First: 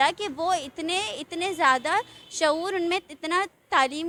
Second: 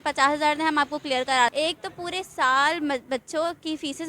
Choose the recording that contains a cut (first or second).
second